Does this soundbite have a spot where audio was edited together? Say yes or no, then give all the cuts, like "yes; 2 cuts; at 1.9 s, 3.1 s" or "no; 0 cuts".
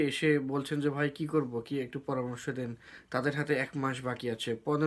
no; 0 cuts